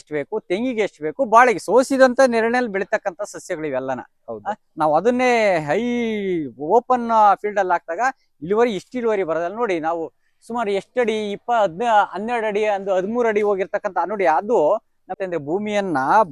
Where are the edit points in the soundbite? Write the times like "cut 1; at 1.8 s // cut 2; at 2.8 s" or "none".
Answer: cut 1; at 15.2 s